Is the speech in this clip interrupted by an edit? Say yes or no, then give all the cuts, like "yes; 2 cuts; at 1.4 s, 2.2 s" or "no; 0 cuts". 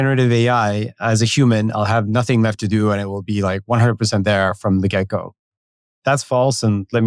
no; 0 cuts